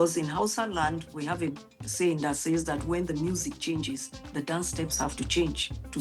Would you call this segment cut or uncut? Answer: uncut